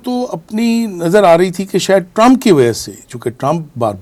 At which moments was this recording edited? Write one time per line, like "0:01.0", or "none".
none